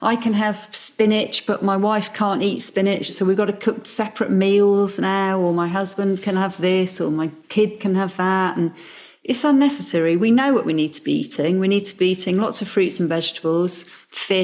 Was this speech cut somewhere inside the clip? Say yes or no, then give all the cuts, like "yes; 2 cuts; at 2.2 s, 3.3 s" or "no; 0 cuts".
yes; 2 cuts; at 3.1 s, 9.1 s